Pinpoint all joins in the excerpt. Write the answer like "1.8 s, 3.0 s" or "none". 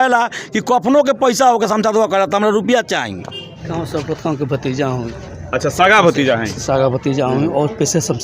3.6 s